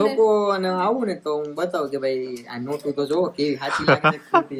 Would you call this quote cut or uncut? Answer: uncut